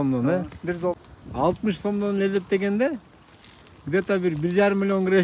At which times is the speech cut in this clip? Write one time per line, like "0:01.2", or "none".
0:01.0